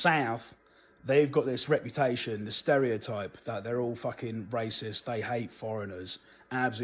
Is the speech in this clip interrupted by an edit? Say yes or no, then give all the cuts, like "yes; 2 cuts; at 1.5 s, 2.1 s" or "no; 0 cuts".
no; 0 cuts